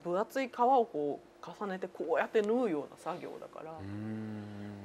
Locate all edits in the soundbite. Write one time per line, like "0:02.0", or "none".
none

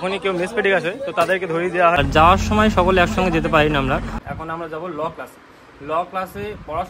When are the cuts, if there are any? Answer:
0:02.0
0:04.2

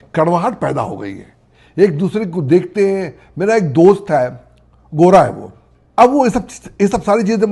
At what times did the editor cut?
none

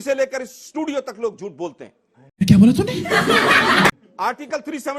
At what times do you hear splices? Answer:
none

